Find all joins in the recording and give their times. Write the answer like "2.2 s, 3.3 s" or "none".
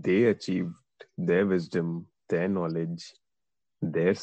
none